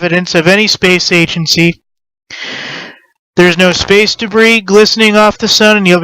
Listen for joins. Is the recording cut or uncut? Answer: cut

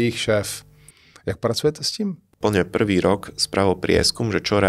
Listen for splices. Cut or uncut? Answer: cut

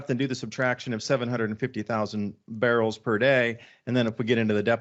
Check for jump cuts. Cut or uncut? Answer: uncut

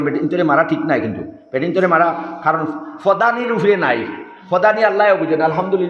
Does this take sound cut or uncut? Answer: uncut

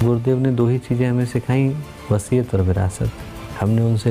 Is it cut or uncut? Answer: cut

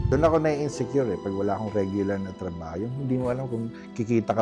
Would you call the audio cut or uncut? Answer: uncut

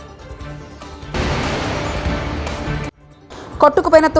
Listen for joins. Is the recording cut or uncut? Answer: cut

